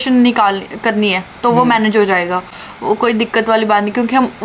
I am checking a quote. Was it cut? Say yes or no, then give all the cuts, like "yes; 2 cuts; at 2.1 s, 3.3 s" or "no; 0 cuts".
no; 0 cuts